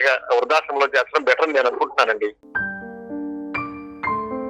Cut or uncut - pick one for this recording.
cut